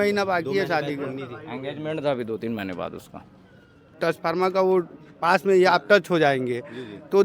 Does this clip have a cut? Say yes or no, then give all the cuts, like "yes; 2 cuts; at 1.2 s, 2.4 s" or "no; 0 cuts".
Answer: yes; 1 cut; at 3.9 s